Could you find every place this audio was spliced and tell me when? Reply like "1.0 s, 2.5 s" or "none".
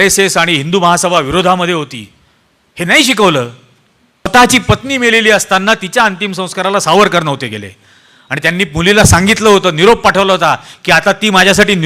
4.3 s